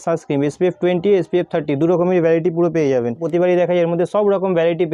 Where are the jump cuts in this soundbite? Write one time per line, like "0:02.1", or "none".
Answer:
none